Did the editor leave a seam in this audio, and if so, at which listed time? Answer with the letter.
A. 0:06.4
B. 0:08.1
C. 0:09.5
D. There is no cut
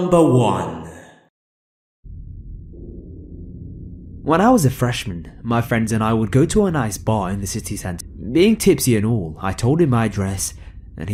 D